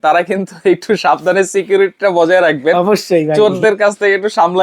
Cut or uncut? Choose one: uncut